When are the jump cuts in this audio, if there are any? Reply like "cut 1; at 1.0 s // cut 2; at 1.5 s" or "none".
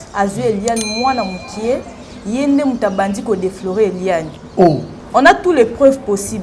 cut 1; at 4.9 s